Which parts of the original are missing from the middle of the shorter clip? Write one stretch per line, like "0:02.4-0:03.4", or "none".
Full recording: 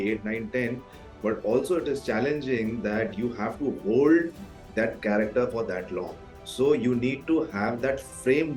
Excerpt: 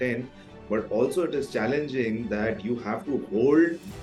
none